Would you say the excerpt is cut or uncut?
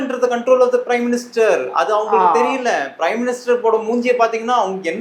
uncut